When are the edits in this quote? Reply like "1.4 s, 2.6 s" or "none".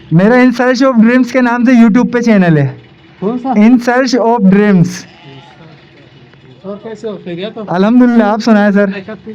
none